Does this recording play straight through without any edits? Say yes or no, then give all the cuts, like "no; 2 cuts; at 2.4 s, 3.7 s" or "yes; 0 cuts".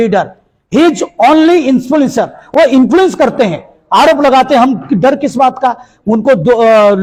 yes; 0 cuts